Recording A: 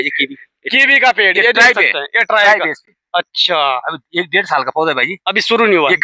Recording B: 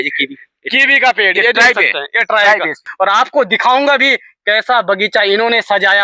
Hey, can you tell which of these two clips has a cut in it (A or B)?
B